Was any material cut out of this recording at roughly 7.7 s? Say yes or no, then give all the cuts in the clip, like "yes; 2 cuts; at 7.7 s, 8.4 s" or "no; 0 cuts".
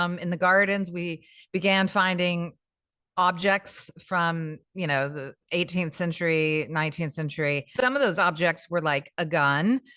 yes; 1 cut; at 7.7 s